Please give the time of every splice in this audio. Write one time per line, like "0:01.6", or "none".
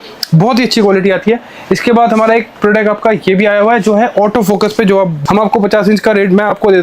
0:05.2